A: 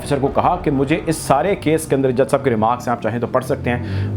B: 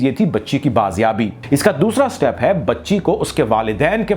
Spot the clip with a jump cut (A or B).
B